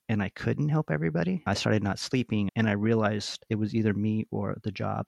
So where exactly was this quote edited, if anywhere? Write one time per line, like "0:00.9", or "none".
0:01.4
0:02.5
0:03.4